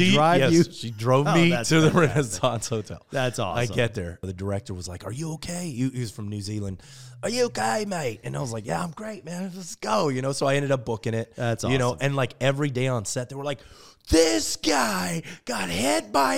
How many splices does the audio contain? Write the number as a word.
one